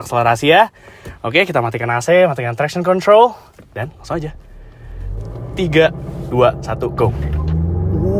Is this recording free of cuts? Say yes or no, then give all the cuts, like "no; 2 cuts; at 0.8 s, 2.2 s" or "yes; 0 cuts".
yes; 0 cuts